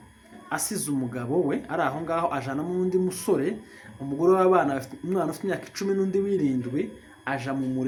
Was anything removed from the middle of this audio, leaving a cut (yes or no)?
no